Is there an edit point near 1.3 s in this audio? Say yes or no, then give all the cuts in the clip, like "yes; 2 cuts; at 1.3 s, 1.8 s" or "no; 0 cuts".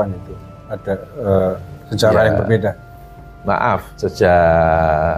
no; 1 cut; at 3.9 s